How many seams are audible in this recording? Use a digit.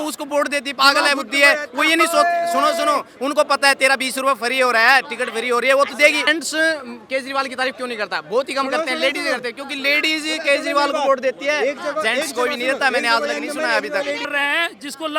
2